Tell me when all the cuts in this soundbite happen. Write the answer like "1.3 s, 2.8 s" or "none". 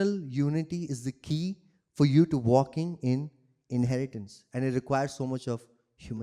none

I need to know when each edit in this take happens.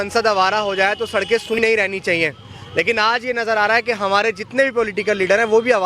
1.6 s

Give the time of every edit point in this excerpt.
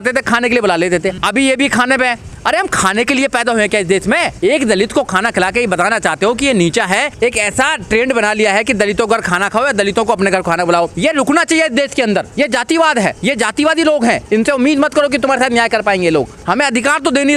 1.2 s, 4.3 s, 7.1 s, 10.9 s, 12.3 s, 13.2 s, 14.2 s, 16.4 s

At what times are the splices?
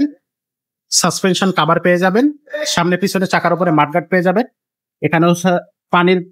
none

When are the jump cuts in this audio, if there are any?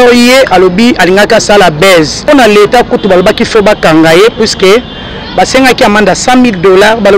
2.2 s

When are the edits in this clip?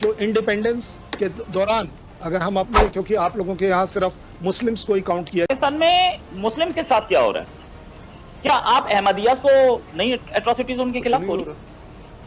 5.5 s

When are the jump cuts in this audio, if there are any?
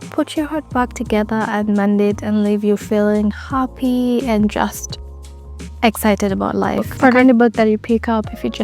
7.2 s

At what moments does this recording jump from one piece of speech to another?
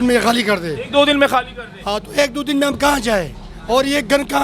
none

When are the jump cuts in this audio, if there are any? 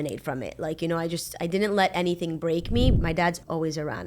3.0 s

